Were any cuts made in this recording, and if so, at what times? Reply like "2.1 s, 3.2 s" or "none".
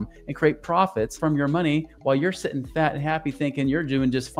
1.1 s